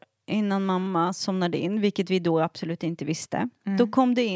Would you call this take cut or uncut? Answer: uncut